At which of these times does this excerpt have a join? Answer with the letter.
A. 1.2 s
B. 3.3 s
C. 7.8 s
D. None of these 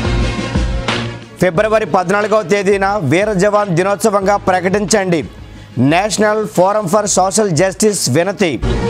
A